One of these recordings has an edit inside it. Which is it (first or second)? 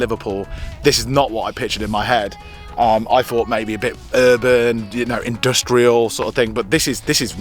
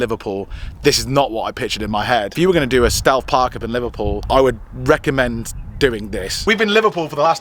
second